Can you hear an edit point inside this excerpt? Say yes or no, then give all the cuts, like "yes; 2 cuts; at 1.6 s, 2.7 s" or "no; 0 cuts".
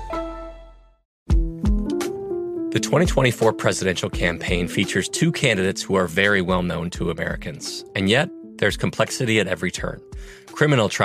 yes; 1 cut; at 1.2 s